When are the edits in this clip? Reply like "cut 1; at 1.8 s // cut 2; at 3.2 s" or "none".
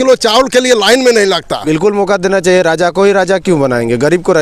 cut 1; at 1.6 s